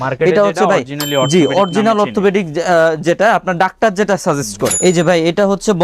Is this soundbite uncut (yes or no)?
no